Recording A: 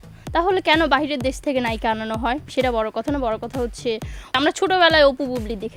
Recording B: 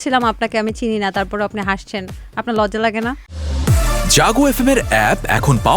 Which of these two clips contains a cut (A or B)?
B